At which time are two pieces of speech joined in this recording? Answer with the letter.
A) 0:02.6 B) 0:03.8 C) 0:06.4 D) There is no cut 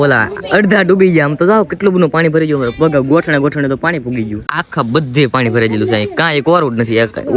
D